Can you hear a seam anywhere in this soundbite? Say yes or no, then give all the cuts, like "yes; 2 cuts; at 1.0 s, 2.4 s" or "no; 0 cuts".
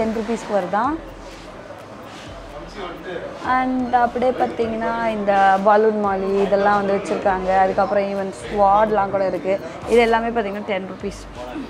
no; 0 cuts